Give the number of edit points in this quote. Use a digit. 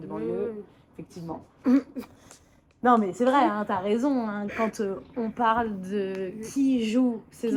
0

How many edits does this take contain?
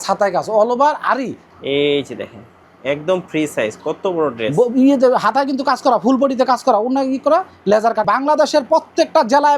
2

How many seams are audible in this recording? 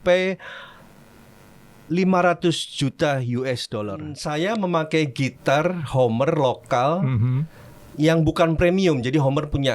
1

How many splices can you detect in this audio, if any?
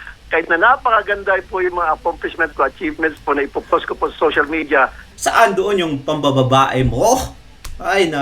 1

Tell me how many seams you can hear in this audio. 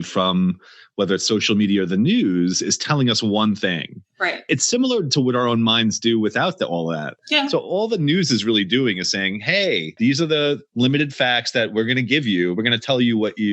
1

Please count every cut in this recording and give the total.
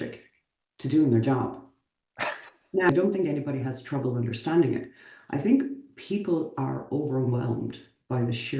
1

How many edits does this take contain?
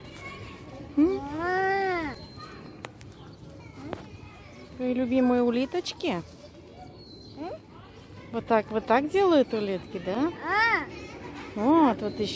0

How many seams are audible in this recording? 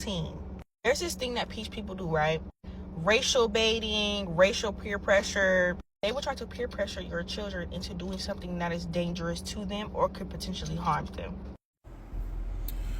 1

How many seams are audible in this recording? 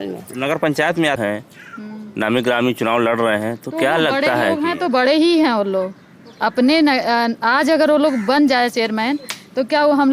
1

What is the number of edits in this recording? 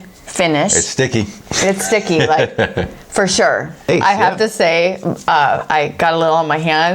1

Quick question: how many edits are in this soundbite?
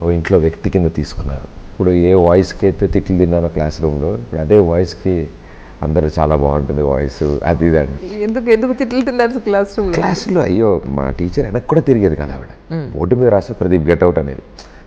2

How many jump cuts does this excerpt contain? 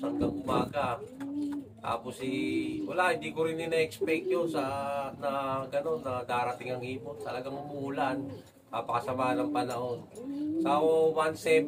0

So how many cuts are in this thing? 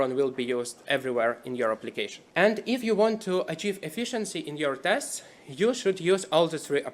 1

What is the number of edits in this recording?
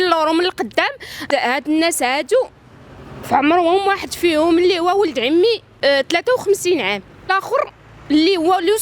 3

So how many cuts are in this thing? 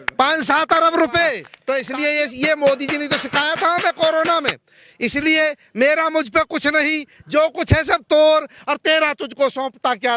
1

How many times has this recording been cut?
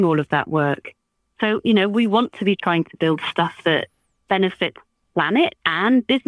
0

